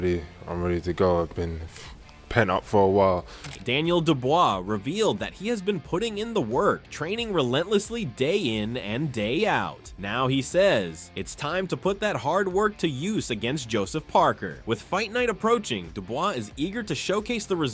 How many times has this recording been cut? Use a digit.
0